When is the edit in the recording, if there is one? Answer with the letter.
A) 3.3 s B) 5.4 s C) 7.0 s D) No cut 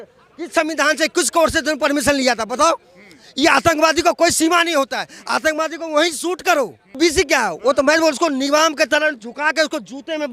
C